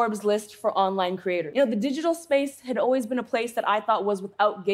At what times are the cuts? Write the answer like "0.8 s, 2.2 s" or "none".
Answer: 1.5 s